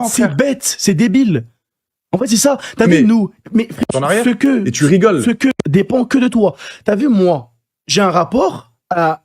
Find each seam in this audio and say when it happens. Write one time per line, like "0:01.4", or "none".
0:03.8
0:05.6